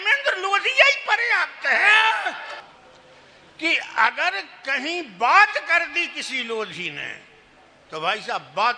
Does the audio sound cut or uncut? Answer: cut